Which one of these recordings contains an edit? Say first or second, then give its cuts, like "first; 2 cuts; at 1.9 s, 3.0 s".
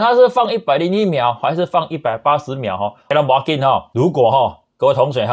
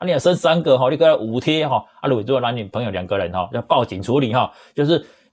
first; 2 cuts; at 3.1 s, 3.9 s